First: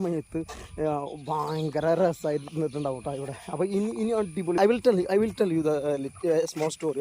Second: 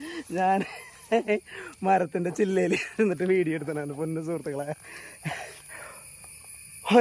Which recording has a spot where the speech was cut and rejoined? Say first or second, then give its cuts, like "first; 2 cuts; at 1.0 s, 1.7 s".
first; 1 cut; at 4.6 s